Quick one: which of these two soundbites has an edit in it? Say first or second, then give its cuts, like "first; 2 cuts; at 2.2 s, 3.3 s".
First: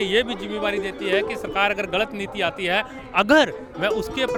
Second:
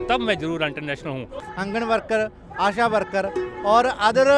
second; 1 cut; at 1.3 s